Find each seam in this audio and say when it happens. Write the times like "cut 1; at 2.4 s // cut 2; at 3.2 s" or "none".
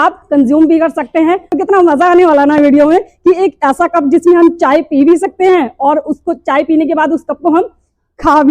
cut 1; at 1.5 s